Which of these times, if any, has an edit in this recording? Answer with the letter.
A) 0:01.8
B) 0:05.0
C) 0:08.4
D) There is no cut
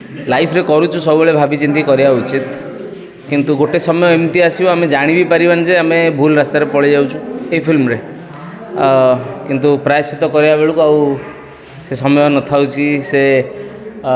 D